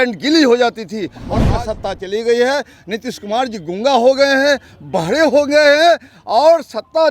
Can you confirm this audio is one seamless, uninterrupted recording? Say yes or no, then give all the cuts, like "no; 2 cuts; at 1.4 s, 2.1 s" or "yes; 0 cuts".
no; 1 cut; at 1.3 s